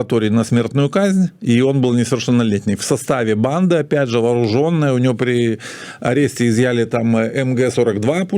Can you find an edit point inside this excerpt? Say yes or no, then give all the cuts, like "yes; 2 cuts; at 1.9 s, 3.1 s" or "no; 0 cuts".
no; 0 cuts